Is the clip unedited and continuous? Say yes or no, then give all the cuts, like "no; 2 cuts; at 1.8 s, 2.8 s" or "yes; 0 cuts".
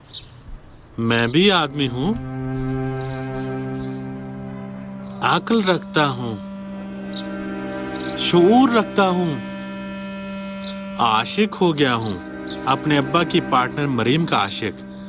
yes; 0 cuts